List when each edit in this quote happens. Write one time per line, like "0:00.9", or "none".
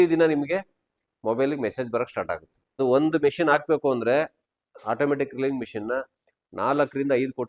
0:02.8